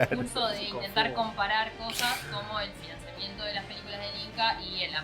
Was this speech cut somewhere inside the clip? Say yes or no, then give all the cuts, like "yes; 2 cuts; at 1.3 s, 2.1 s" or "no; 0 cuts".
no; 0 cuts